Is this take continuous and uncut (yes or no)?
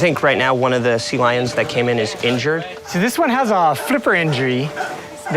no